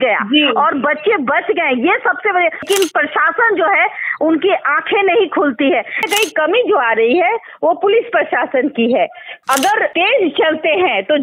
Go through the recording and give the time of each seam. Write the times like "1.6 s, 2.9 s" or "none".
2.6 s, 6.0 s, 9.4 s